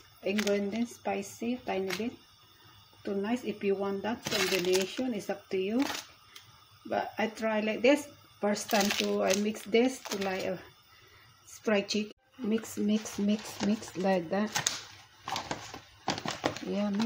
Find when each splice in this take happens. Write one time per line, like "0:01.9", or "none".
0:12.2